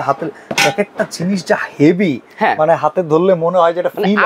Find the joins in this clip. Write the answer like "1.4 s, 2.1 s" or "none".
none